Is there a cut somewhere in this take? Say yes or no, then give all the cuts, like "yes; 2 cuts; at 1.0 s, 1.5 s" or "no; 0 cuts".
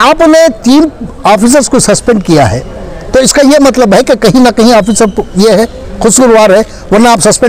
no; 0 cuts